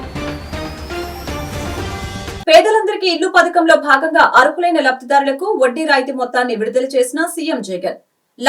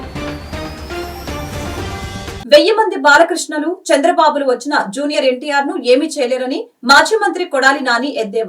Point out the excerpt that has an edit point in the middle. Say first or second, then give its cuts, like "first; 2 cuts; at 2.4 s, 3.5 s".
first; 1 cut; at 2.2 s